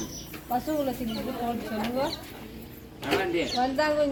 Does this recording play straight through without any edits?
yes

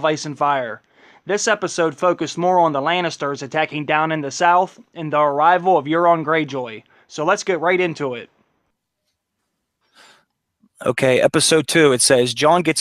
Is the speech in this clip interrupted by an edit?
no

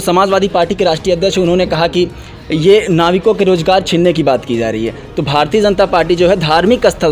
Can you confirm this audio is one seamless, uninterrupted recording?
yes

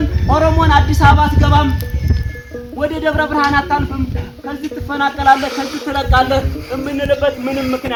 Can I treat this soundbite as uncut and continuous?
yes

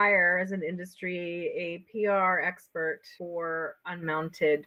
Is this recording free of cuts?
yes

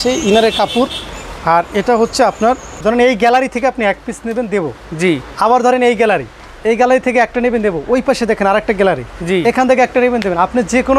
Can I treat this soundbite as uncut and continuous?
no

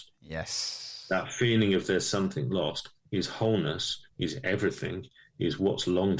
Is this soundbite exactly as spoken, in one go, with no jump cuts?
yes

